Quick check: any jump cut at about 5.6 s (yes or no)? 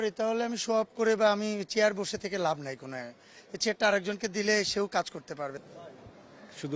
yes